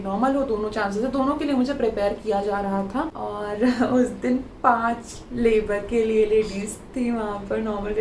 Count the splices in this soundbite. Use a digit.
1